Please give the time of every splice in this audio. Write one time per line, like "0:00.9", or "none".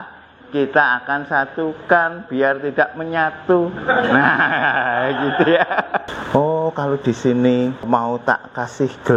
0:06.1
0:07.8

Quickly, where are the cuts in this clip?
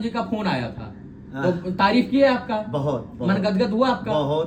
none

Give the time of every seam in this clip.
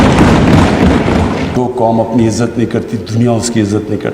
0:01.5

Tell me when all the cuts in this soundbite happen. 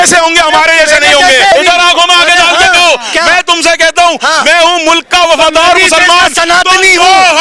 0:01.5

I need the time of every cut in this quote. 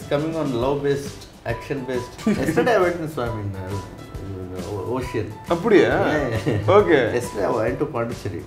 0:02.1

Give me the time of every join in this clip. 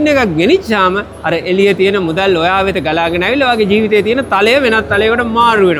none

